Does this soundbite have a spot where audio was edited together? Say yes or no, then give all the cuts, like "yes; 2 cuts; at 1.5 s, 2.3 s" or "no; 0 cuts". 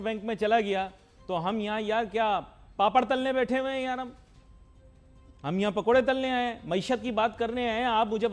no; 0 cuts